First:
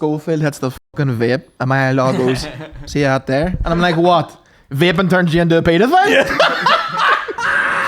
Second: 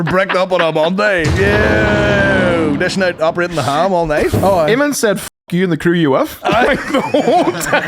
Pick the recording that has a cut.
second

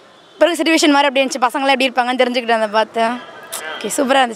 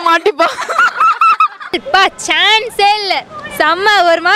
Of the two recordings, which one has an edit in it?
second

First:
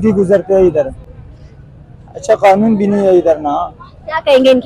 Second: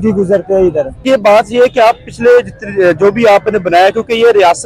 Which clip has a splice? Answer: second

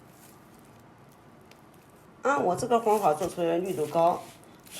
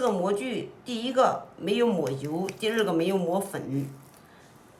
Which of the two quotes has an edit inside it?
first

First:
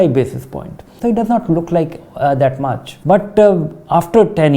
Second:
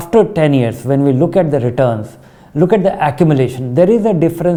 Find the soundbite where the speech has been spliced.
first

